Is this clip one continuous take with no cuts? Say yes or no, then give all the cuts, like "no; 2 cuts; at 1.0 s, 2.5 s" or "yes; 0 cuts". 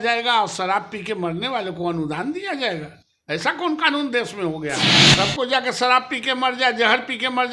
no; 1 cut; at 5.0 s